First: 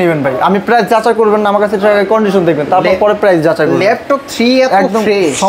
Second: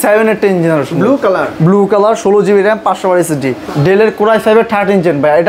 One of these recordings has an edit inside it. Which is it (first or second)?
second